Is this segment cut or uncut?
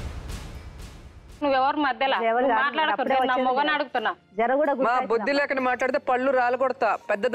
uncut